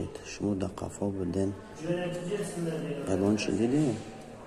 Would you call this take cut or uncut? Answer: uncut